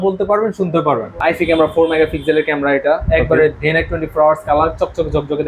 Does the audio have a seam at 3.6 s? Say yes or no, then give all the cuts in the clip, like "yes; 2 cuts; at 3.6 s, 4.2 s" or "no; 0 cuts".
no; 1 cut; at 1.2 s